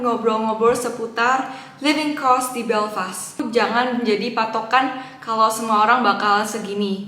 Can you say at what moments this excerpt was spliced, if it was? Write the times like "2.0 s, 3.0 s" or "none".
3.4 s